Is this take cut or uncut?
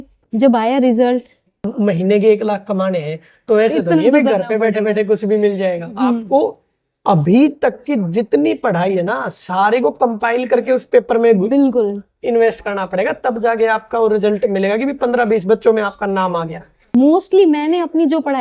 cut